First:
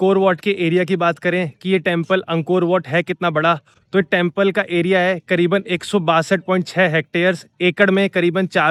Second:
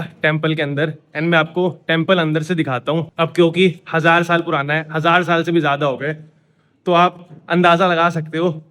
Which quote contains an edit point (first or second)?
second